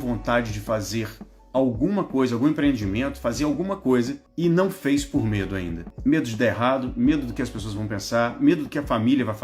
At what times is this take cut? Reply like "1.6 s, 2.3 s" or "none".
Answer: 4.2 s, 5.8 s